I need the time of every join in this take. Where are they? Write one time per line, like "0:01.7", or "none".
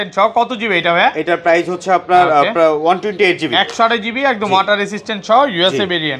none